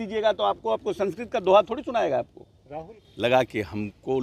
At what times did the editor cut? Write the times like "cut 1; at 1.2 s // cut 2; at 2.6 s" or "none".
cut 1; at 3.0 s